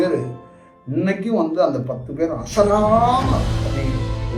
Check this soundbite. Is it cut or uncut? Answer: uncut